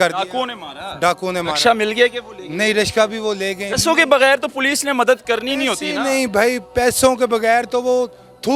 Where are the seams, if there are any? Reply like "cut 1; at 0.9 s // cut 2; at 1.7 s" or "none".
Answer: cut 1; at 3.7 s

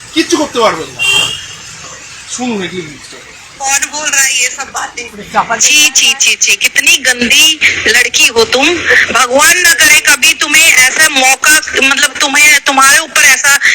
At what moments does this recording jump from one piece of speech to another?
cut 1; at 3.4 s

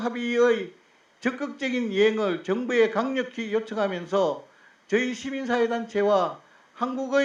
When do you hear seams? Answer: none

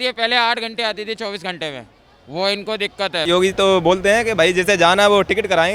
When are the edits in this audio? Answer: cut 1; at 3.2 s

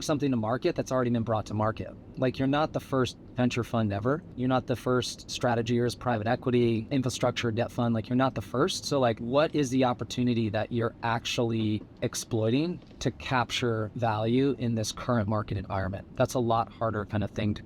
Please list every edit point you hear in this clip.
cut 1; at 4.3 s // cut 2; at 5.2 s // cut 3; at 6.8 s // cut 4; at 9.2 s

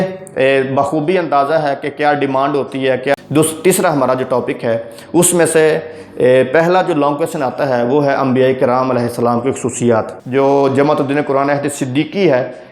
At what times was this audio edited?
cut 1; at 3.1 s // cut 2; at 10.2 s

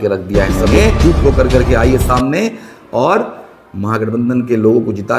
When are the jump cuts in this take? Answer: cut 1; at 1.0 s

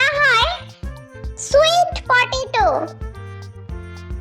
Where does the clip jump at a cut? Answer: cut 1; at 3.2 s

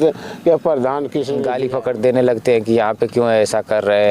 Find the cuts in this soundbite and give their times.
cut 1; at 1.3 s

